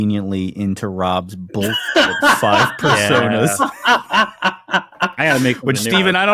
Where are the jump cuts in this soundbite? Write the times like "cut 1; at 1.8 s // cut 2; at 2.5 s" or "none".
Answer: none